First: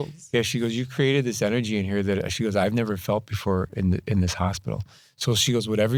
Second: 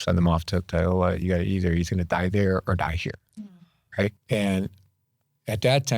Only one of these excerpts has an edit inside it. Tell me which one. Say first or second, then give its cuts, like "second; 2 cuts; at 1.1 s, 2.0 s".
second; 1 cut; at 4.2 s